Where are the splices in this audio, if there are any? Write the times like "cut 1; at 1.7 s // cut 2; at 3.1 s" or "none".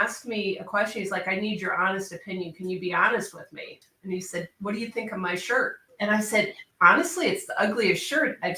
cut 1; at 3.8 s // cut 2; at 5.8 s